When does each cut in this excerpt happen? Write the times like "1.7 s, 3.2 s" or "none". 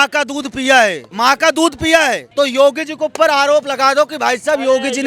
1.0 s, 2.2 s